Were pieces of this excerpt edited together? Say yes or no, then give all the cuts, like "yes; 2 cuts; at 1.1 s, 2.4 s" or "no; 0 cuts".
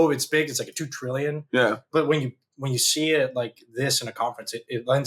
no; 0 cuts